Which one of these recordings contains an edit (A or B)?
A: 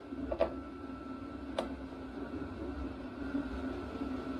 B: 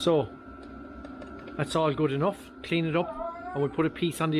A